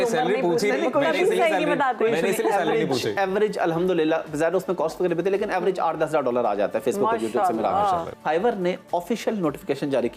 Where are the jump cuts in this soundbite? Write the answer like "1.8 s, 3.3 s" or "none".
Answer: 8.1 s